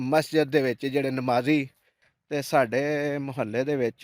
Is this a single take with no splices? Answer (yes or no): no